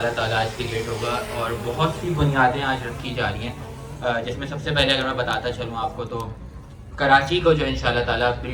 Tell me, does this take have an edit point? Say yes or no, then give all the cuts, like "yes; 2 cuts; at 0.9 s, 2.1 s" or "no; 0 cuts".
no; 0 cuts